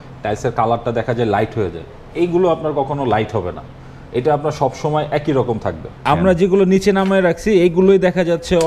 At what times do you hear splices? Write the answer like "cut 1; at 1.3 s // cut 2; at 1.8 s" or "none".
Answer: cut 1; at 6.0 s